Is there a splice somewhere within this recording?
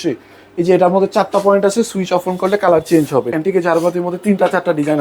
yes; 1 cut; at 3.4 s

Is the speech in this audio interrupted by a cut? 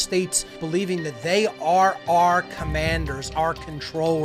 yes; 1 cut; at 3.2 s

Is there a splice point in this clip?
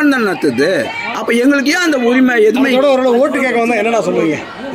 yes; 1 cut; at 1.1 s

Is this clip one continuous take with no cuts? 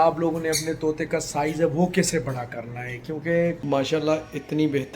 no; 1 cut; at 3.6 s

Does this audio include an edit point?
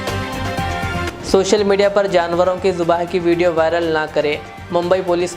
yes; 1 cut; at 1.1 s

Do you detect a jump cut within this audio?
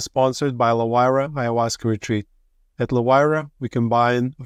no; 0 cuts

